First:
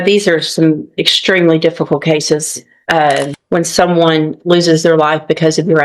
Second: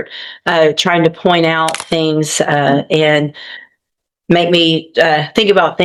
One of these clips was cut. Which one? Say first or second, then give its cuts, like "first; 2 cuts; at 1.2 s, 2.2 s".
first; 1 cut; at 3.4 s